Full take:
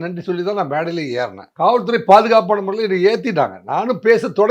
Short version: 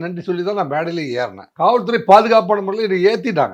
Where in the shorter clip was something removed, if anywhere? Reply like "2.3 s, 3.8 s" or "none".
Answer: none